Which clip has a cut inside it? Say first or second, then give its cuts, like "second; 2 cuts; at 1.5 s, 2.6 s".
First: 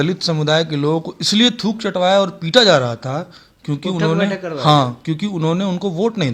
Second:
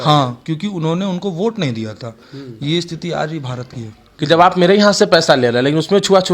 second; 1 cut; at 4.1 s